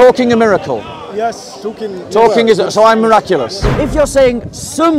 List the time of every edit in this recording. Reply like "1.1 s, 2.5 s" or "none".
3.6 s